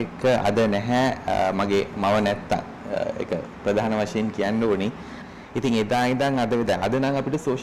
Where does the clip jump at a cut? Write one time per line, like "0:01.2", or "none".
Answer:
0:05.1